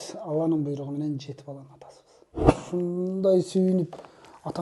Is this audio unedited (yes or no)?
no